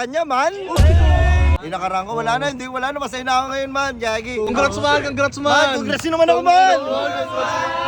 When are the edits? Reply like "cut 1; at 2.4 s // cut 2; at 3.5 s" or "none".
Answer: cut 1; at 1.6 s // cut 2; at 4.5 s